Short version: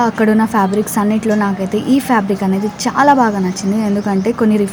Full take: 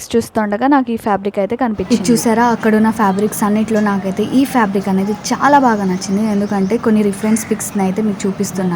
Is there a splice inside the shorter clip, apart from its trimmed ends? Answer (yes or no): no